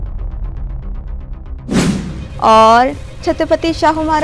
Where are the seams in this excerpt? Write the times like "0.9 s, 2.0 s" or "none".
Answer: none